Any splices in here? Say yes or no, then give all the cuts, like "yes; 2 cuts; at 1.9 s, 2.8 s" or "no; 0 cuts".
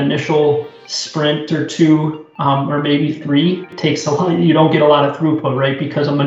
no; 0 cuts